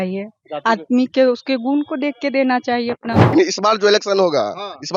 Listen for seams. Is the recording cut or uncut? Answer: cut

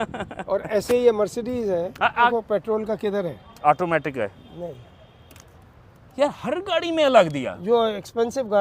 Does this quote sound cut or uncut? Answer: cut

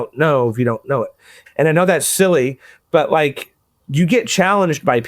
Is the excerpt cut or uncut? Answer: cut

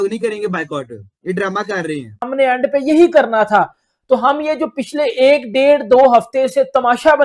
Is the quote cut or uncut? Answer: cut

